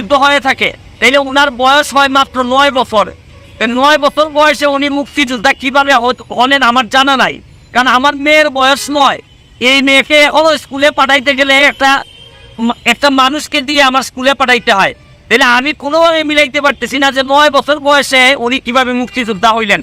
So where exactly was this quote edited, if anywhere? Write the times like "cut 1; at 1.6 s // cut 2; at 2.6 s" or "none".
none